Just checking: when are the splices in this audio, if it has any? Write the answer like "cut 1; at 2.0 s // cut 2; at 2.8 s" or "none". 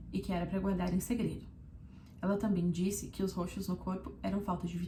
none